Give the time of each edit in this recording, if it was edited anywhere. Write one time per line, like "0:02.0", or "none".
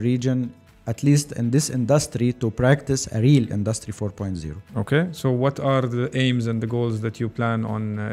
none